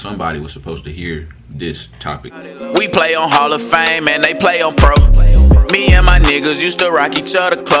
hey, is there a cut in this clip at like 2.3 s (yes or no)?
yes